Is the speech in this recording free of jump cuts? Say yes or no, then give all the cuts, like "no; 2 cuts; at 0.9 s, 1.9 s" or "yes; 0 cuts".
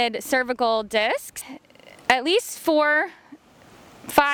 yes; 0 cuts